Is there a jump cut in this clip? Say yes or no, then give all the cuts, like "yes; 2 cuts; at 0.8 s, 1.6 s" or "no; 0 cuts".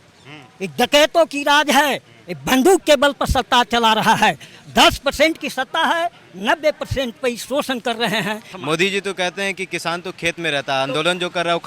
yes; 1 cut; at 8.5 s